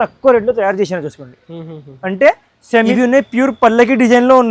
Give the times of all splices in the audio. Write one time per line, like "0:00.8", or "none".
0:02.9